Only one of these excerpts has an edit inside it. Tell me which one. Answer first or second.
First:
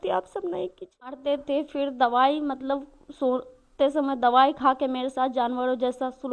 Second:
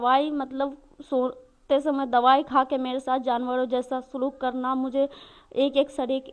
first